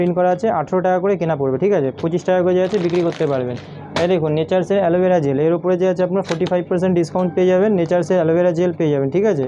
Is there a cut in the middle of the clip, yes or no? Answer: no